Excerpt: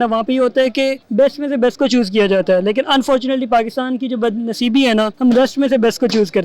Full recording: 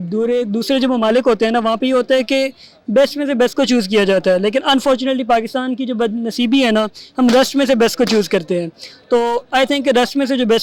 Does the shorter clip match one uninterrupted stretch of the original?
no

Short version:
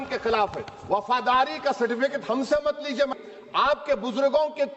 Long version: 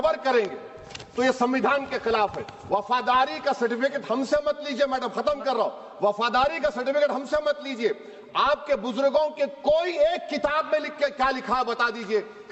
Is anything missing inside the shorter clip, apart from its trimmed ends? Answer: yes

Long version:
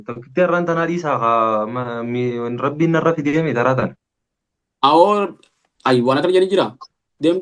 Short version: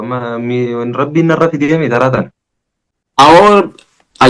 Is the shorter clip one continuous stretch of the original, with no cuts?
yes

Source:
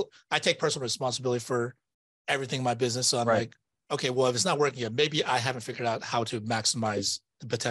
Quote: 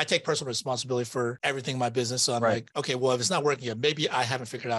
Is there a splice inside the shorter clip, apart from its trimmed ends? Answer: yes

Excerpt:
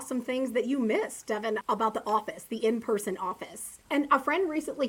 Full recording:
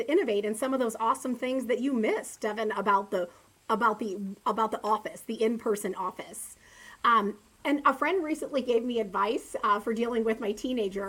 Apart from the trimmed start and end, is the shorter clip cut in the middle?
yes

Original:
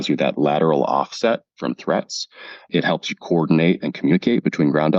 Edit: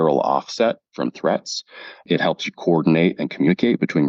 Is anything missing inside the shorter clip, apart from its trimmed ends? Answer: no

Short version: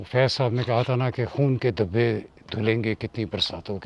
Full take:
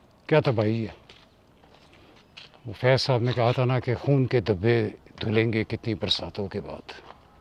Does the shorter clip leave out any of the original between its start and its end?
no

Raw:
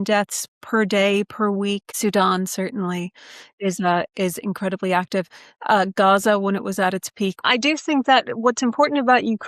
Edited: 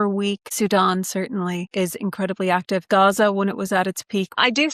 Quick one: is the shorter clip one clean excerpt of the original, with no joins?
no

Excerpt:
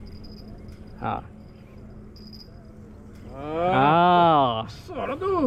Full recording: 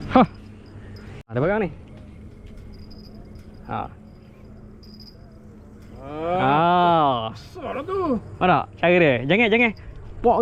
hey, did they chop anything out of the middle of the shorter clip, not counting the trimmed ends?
no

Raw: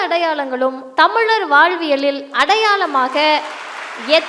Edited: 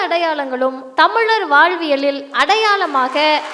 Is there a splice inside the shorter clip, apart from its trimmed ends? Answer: no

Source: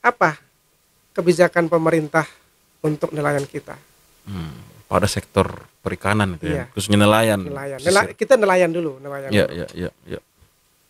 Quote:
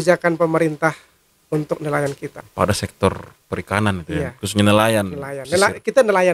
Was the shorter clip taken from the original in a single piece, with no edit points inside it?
no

